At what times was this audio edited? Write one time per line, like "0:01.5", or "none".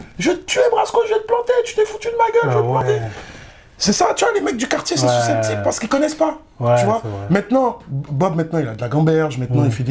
none